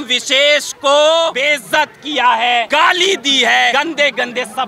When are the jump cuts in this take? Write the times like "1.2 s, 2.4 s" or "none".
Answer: 1.4 s, 2.7 s, 3.7 s